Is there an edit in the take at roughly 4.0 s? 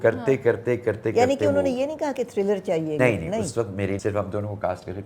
yes; 2 cuts; at 3.0 s, 4.0 s

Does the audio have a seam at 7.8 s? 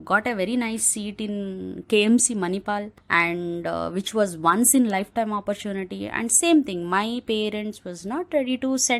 no; 1 cut; at 3.0 s

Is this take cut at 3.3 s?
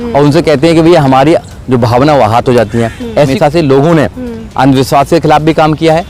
yes; 1 cut; at 3.3 s

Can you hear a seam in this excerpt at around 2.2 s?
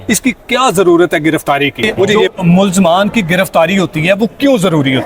yes; 1 cut; at 2.2 s

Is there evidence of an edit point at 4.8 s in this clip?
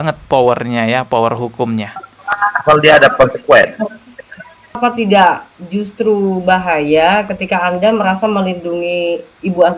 yes; 1 cut; at 4.8 s

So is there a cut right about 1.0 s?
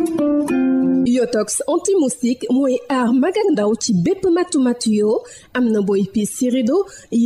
yes; 1 cut; at 1.0 s

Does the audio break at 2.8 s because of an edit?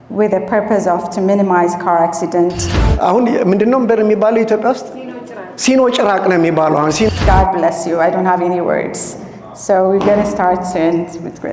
yes; 2 cuts; at 2.8 s, 7.1 s

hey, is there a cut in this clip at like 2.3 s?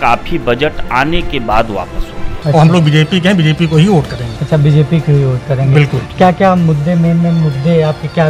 yes; 1 cut; at 2.3 s

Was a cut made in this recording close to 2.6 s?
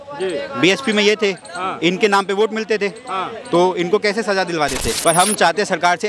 no; 1 cut; at 4.9 s

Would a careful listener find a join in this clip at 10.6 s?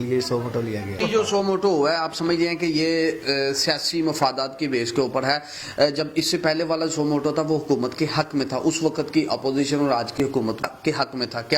yes; 2 cuts; at 1.0 s, 10.6 s

